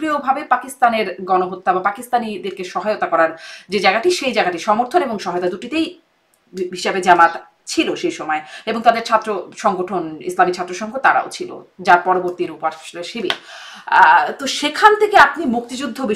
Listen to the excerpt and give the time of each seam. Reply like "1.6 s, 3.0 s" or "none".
none